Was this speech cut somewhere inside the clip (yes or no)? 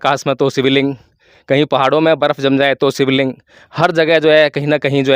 no